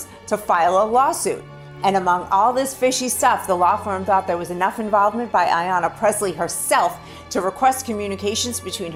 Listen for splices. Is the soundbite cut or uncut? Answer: uncut